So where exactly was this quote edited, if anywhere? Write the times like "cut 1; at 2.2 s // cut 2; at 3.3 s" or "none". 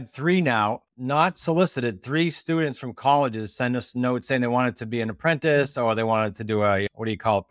none

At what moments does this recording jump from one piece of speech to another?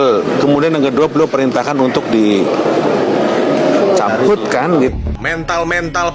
cut 1; at 5.1 s

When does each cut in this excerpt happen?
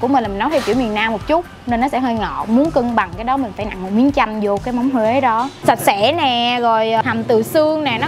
cut 1; at 5.5 s // cut 2; at 7.0 s

